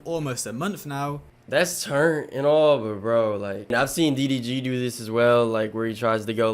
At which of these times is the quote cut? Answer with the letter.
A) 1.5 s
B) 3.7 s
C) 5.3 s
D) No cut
B